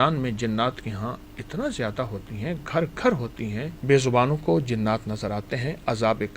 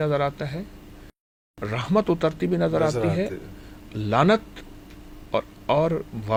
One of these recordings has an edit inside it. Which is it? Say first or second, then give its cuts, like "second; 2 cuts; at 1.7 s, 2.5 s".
first; 1 cut; at 3.7 s